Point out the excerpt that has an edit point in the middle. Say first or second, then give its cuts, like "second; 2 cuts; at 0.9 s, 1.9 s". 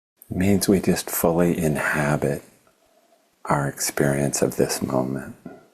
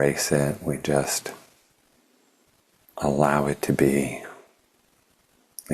second; 1 cut; at 2.5 s